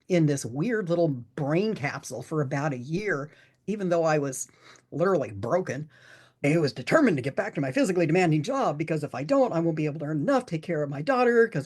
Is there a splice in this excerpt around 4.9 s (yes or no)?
no